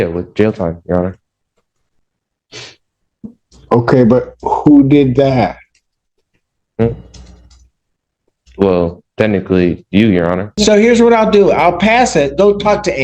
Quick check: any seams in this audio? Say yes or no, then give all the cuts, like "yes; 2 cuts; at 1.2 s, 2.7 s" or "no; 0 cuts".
yes; 1 cut; at 10.6 s